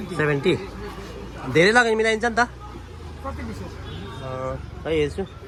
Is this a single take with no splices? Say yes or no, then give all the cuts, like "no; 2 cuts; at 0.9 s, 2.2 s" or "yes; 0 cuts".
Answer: yes; 0 cuts